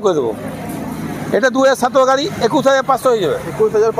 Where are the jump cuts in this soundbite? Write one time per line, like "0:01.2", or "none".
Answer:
none